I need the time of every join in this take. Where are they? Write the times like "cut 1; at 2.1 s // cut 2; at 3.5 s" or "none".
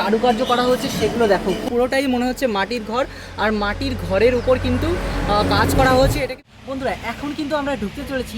cut 1; at 1.6 s // cut 2; at 6.5 s

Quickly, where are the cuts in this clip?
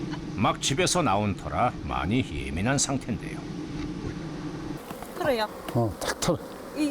cut 1; at 4.8 s

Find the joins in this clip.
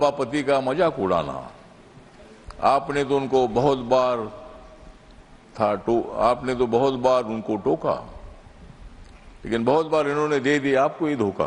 none

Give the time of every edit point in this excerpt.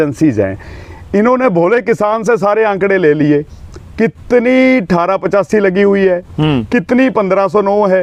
none

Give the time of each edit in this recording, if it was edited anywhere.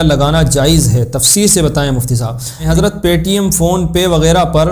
cut 1; at 2.7 s

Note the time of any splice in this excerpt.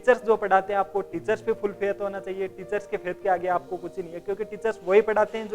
none

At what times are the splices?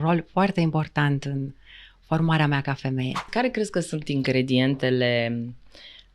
cut 1; at 3.3 s

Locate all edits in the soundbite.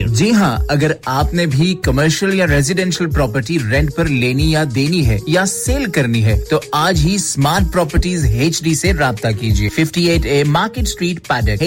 none

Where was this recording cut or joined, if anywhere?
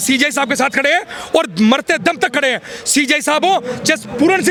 none

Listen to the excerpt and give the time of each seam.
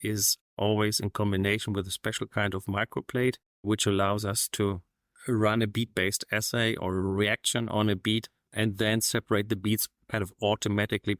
none

